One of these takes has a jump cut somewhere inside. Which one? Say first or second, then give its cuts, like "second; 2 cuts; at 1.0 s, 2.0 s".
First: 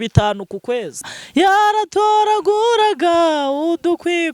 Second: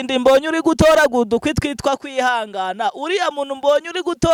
first; 1 cut; at 1.1 s